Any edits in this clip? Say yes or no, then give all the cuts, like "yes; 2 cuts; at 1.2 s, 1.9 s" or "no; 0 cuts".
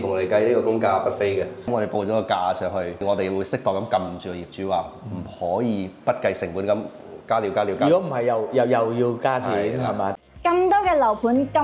yes; 3 cuts; at 1.7 s, 3.0 s, 10.1 s